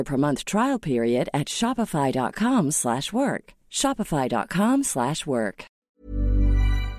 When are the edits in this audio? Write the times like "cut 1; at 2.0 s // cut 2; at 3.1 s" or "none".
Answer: cut 1; at 5.9 s